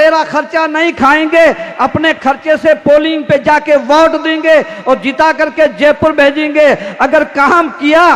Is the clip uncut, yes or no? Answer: yes